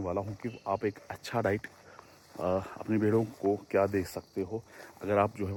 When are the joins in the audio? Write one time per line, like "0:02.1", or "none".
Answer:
none